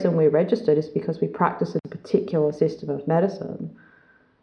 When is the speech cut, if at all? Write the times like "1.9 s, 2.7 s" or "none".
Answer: 1.8 s